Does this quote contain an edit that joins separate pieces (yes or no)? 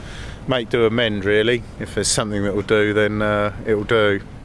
no